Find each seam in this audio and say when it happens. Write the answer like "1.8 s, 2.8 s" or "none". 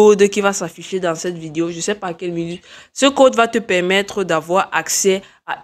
none